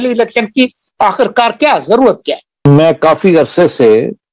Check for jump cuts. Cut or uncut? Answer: cut